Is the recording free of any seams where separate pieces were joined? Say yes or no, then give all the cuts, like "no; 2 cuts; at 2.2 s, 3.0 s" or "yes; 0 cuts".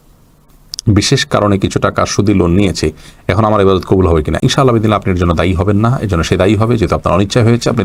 yes; 0 cuts